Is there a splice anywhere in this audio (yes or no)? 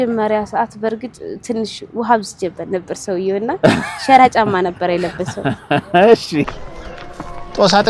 yes